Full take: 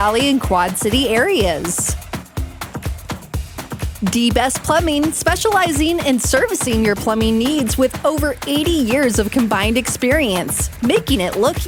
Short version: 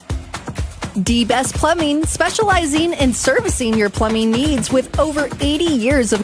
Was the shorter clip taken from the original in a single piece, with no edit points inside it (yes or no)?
no